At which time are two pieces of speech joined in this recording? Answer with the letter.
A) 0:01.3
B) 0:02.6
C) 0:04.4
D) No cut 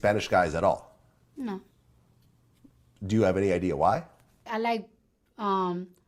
C